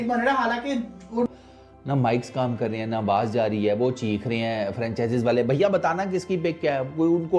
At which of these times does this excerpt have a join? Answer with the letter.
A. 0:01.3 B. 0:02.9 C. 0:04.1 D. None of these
A